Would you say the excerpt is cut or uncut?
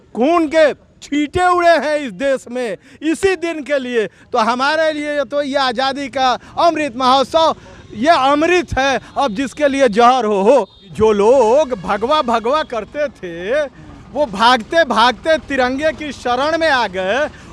cut